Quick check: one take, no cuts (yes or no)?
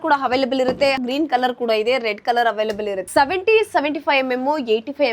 no